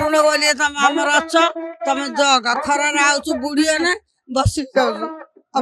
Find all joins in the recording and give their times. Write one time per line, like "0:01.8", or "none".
none